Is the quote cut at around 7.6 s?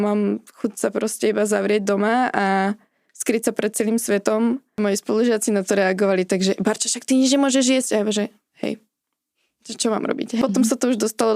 no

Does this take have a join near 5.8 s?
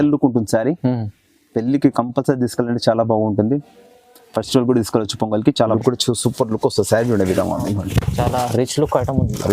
yes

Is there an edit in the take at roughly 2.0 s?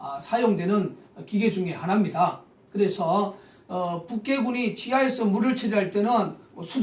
no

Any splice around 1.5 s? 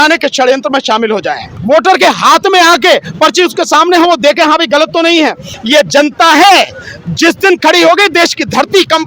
yes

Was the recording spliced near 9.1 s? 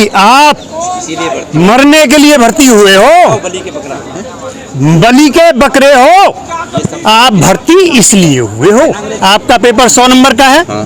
yes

